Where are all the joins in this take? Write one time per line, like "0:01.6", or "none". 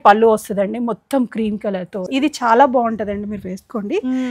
0:02.0